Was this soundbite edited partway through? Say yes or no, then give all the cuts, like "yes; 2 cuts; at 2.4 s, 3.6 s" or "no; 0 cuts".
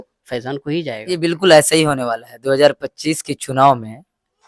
no; 0 cuts